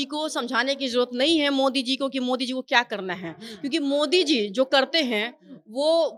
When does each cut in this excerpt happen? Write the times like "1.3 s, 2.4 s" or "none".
none